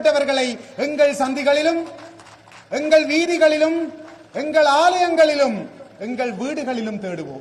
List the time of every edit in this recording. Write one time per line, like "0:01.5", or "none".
none